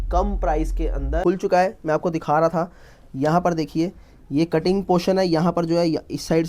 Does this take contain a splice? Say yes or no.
yes